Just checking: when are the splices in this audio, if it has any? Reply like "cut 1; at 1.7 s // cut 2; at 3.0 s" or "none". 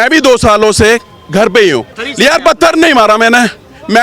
cut 1; at 2.0 s